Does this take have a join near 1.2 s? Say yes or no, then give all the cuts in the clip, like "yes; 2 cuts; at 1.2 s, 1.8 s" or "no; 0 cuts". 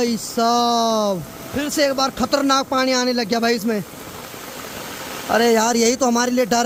no; 0 cuts